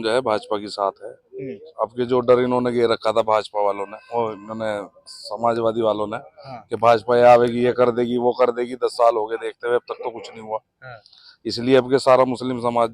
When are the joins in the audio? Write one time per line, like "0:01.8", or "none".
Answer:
none